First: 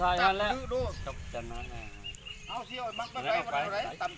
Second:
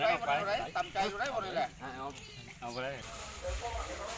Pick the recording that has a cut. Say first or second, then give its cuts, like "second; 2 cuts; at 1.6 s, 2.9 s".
second; 1 cut; at 3.1 s